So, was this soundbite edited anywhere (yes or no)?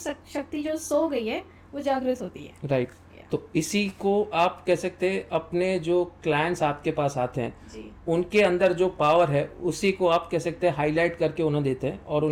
no